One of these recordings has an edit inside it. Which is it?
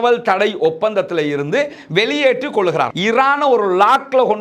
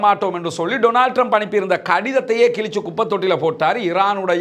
first; 1 cut; at 2.9 s

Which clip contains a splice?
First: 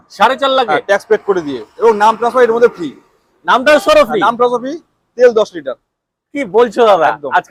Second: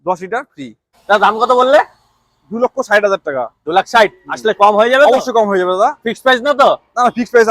second; 1 cut; at 1.1 s

